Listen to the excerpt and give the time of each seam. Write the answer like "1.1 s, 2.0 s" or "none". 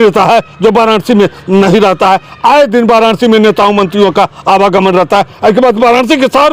none